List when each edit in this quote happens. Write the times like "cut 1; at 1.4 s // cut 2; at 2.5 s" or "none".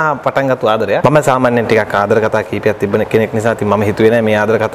cut 1; at 1.0 s